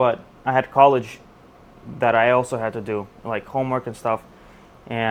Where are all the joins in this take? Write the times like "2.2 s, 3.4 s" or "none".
none